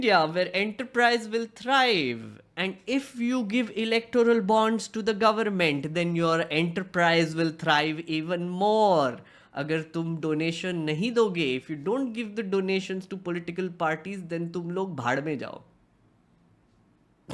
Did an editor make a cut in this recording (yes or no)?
no